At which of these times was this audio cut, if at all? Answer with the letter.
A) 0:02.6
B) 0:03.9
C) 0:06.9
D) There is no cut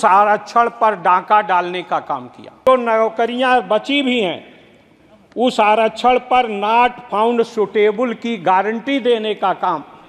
A